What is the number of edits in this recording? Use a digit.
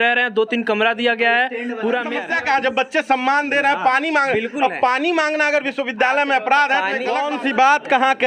2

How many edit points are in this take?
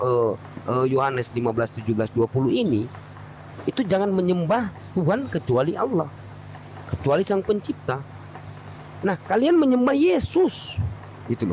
0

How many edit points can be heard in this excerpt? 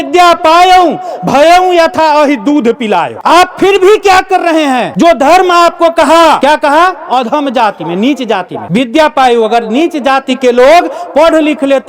4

